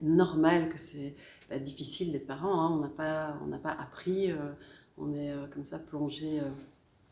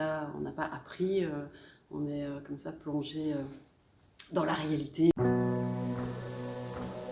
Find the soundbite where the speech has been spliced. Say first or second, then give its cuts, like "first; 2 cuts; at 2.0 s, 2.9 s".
second; 1 cut; at 5.1 s